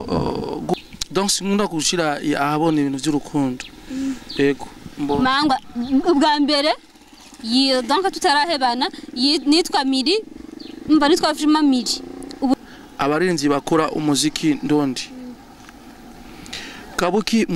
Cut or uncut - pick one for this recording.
cut